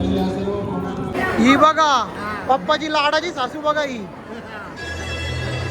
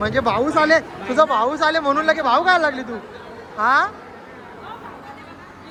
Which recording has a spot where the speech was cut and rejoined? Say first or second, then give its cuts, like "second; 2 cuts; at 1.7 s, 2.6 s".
first; 1 cut; at 1.1 s